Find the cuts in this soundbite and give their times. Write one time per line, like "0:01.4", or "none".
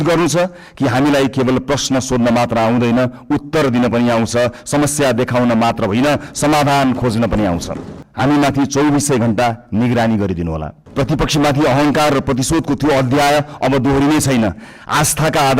0:08.0
0:10.8